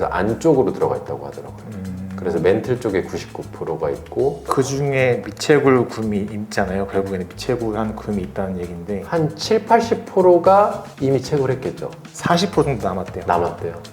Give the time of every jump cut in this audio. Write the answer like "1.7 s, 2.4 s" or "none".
4.4 s